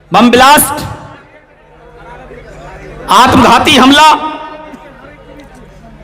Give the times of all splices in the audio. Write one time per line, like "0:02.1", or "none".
0:01.5